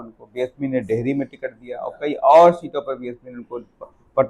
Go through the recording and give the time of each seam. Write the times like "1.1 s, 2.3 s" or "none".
none